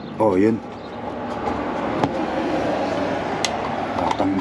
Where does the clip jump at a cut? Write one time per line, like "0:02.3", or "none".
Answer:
none